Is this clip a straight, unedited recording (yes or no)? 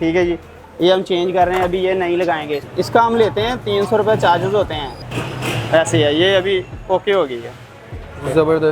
no